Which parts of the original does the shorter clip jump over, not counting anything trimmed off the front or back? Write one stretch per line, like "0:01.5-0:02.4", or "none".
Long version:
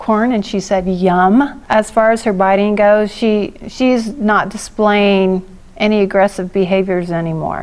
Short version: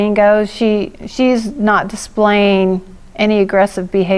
none